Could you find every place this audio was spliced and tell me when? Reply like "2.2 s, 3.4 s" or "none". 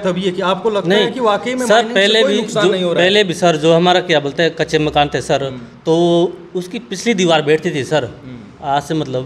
none